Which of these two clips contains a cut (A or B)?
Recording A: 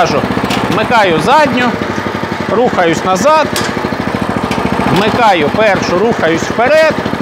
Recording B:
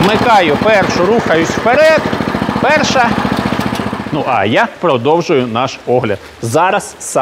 B